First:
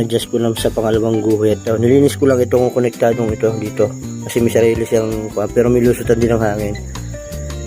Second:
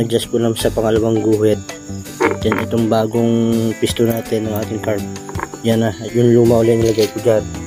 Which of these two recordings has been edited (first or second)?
first